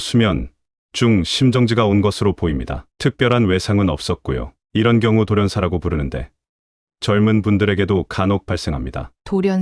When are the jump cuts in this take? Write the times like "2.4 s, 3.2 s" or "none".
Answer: none